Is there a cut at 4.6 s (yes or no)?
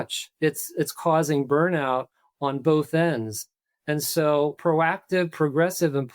yes